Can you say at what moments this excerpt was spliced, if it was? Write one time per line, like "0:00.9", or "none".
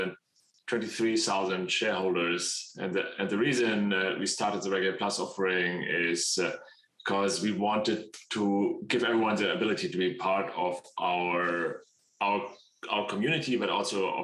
none